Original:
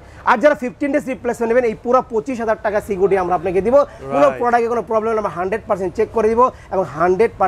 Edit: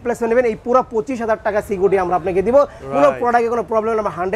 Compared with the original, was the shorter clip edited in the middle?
no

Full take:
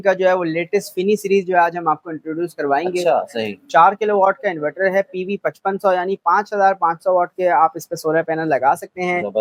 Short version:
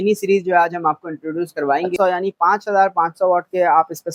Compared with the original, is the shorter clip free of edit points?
no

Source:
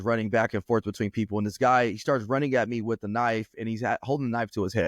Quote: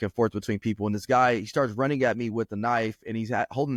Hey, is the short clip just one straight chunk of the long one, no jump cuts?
yes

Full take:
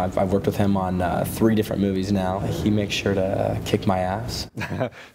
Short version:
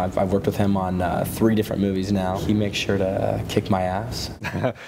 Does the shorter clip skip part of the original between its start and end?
yes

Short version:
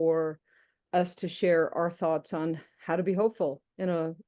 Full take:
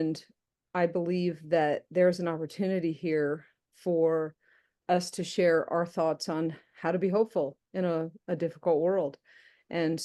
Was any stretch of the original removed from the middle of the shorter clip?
no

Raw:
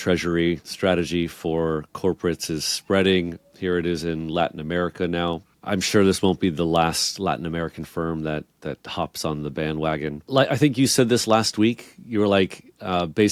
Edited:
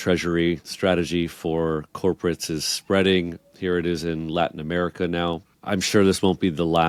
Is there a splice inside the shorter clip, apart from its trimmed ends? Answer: no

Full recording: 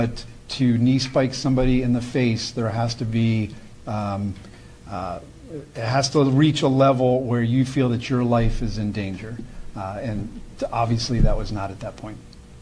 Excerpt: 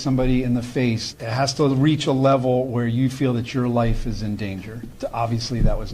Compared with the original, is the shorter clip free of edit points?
no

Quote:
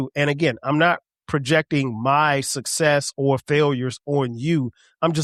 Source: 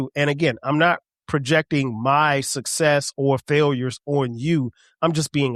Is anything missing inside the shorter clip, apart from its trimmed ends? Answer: no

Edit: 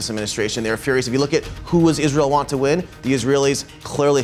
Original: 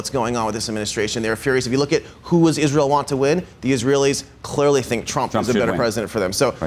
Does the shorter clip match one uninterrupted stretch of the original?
yes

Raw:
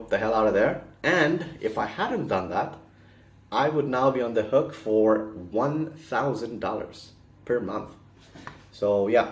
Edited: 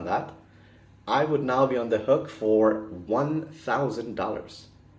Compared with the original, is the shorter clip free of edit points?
yes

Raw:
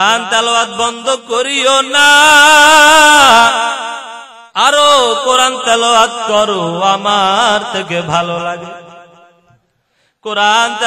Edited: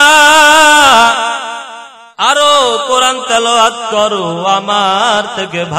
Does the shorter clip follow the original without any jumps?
yes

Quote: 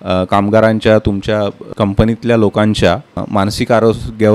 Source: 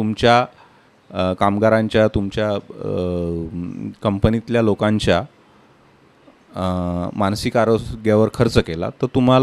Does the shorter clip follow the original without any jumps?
no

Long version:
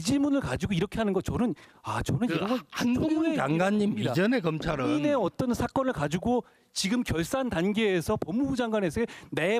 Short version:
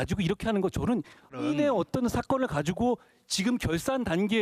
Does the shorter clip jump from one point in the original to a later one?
yes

